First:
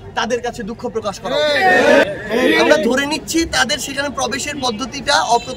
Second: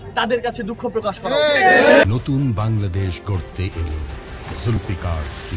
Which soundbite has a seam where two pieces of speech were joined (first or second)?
first